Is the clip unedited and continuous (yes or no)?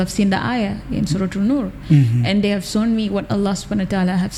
yes